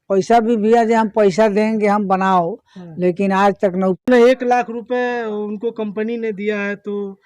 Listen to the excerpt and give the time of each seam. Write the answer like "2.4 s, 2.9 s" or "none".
4.0 s